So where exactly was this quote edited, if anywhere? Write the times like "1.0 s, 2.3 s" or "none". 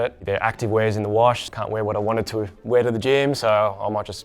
1.5 s

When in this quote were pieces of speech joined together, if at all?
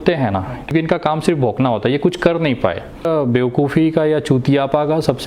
0.7 s, 3.1 s

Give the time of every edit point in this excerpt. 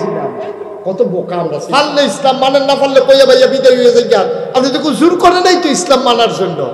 1.6 s

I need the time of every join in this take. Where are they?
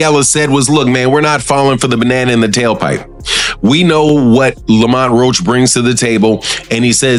none

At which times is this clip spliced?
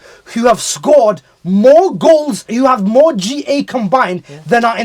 2.4 s

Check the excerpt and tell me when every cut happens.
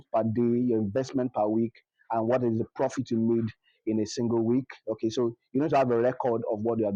none

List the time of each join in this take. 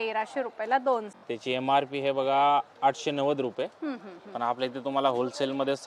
1.1 s

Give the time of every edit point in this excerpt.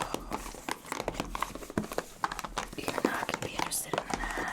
none

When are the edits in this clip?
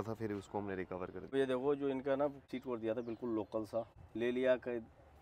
1.3 s, 2.4 s, 4.0 s

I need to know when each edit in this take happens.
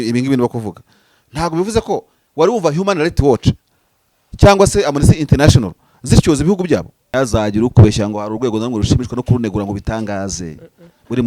7.0 s

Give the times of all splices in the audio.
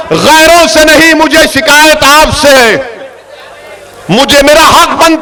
none

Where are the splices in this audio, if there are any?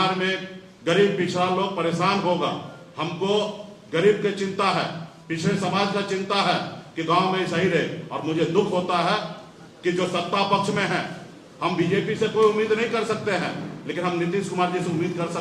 none

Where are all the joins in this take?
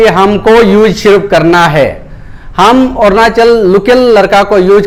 none

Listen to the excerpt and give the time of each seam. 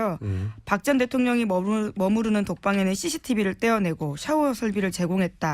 1.2 s

